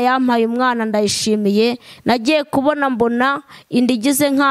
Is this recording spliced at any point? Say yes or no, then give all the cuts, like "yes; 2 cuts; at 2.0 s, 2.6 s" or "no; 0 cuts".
yes; 1 cut; at 1.9 s